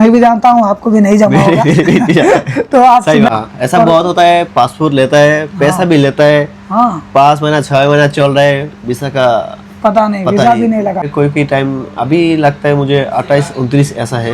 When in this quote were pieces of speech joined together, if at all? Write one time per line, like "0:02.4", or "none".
0:03.3
0:11.1